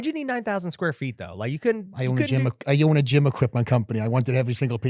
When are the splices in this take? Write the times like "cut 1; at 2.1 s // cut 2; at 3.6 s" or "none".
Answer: none